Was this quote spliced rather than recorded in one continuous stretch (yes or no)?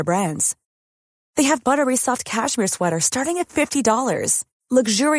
no